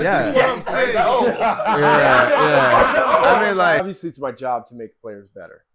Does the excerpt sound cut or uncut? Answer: cut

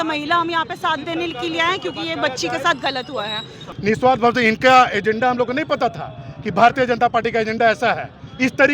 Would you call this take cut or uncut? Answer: cut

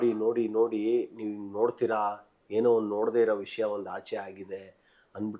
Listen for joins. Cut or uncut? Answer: uncut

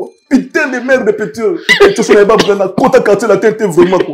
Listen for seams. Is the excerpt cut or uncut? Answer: cut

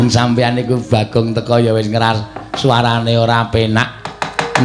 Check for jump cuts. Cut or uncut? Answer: uncut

